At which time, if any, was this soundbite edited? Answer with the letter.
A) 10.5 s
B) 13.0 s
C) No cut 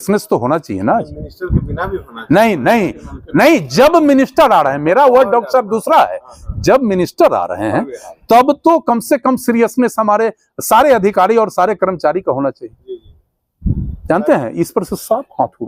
C